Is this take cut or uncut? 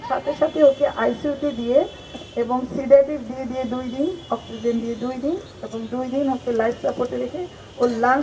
uncut